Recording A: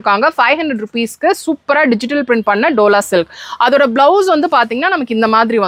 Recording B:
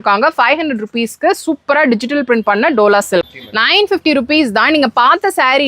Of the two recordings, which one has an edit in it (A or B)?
B